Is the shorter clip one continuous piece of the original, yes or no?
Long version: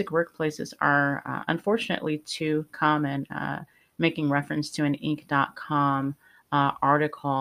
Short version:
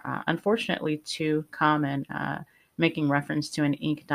yes